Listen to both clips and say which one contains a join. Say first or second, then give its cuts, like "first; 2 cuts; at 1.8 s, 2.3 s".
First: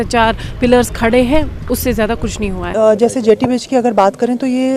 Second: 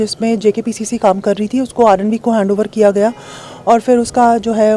first; 1 cut; at 2.6 s